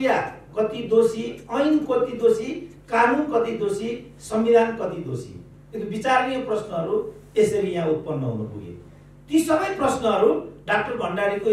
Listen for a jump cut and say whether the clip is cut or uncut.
uncut